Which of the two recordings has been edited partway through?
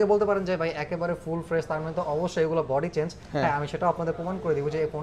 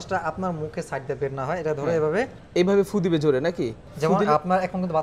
second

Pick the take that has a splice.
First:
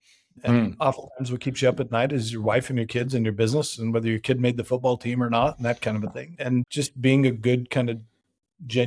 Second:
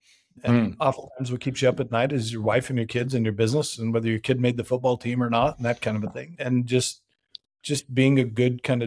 first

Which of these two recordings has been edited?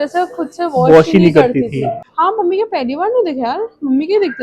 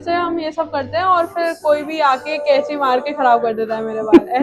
first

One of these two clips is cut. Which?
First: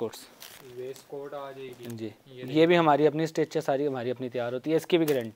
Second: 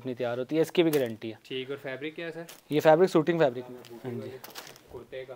second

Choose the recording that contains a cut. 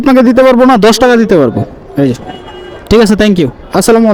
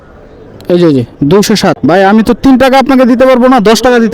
second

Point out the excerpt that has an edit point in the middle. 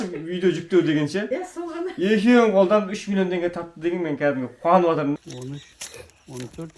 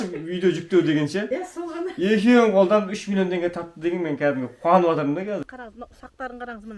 first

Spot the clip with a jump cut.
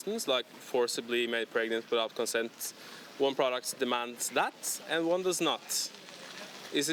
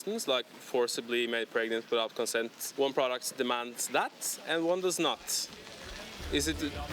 second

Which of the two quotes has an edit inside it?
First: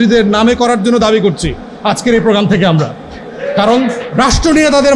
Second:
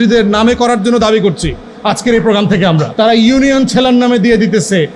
second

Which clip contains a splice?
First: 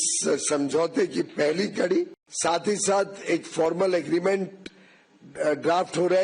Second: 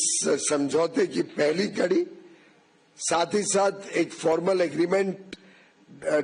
first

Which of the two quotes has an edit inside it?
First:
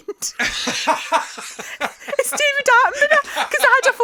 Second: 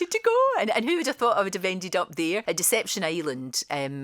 second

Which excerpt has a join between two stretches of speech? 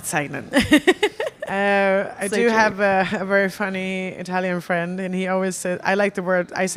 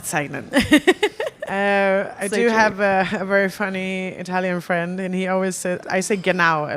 second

